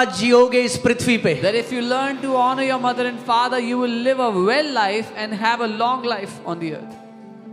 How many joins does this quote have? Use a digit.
0